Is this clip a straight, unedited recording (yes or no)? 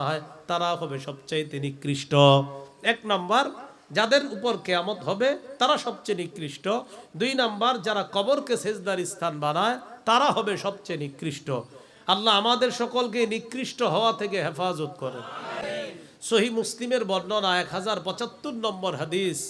no